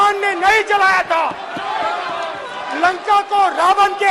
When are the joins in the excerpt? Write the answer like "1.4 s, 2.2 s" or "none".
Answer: none